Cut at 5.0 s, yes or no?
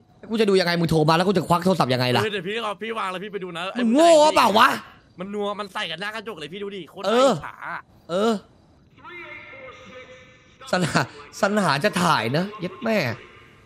no